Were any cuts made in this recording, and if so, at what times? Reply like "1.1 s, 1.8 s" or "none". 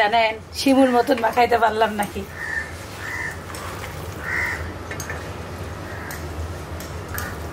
none